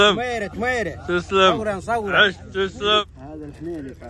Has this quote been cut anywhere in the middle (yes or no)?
yes